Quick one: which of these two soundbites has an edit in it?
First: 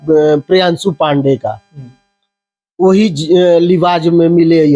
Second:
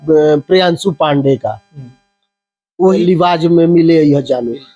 second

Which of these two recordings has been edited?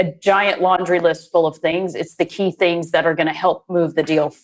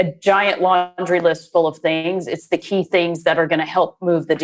first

